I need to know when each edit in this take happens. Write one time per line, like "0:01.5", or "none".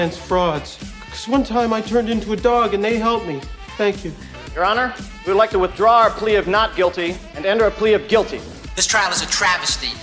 none